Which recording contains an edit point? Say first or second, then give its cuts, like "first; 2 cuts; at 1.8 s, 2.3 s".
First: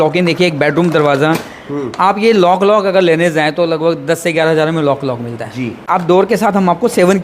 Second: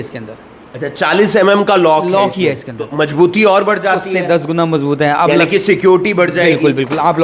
first; 1 cut; at 6.0 s